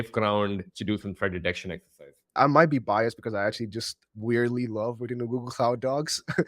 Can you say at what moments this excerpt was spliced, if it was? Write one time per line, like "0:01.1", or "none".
0:02.4
0:04.0